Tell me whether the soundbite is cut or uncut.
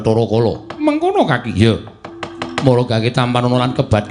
uncut